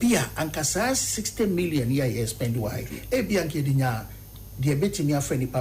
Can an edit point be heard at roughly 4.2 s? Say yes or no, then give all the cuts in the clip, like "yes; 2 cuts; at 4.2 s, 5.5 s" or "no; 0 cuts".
no; 0 cuts